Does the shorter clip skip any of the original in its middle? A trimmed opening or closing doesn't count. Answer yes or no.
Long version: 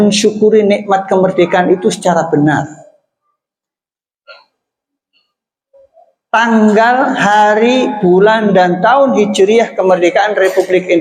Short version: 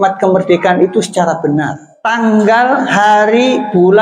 yes